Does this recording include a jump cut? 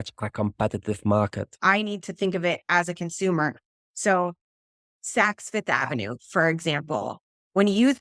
yes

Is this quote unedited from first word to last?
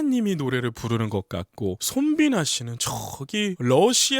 no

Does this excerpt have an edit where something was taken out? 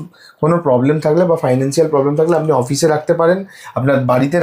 no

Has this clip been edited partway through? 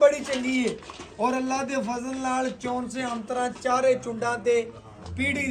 no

